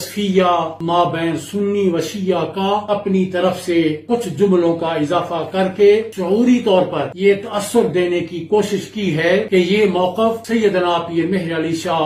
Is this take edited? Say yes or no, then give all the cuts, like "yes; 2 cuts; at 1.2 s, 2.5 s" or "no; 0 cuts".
no; 0 cuts